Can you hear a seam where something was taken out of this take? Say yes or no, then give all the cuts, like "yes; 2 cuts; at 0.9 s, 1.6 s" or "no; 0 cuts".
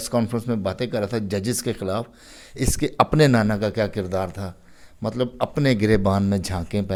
no; 0 cuts